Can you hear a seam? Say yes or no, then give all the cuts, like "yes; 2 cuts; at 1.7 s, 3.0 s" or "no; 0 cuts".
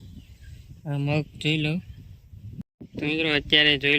yes; 1 cut; at 2.8 s